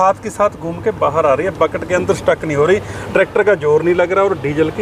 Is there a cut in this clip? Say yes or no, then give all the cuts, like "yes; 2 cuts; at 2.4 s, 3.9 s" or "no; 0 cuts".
no; 0 cuts